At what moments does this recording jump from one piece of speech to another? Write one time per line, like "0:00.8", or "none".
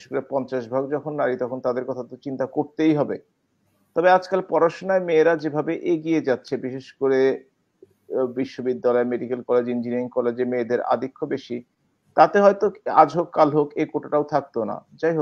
none